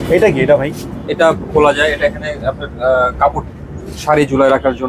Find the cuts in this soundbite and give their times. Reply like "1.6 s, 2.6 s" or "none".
none